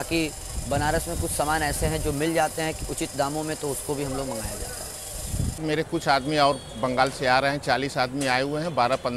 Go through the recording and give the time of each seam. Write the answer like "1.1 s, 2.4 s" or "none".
5.6 s